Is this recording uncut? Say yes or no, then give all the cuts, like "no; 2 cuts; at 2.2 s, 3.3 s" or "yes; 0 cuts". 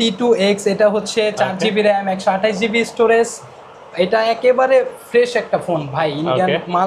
yes; 0 cuts